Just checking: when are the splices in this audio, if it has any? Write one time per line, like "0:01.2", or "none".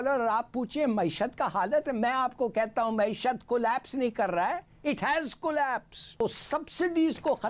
0:06.2